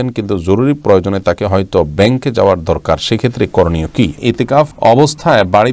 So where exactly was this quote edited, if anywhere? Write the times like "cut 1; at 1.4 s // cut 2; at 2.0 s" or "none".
cut 1; at 4.6 s